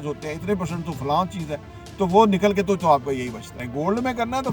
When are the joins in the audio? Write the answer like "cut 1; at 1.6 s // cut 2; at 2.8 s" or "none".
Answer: cut 1; at 3.6 s